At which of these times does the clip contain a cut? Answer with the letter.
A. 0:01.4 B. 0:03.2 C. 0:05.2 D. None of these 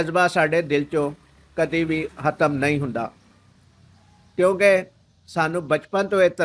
D